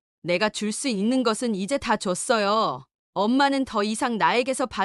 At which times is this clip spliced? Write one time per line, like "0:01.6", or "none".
none